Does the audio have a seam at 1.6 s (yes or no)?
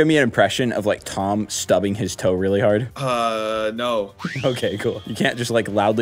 no